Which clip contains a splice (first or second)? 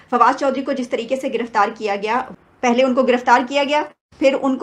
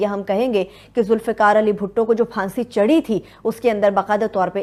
first